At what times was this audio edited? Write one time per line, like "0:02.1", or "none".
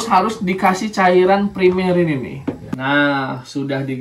0:02.7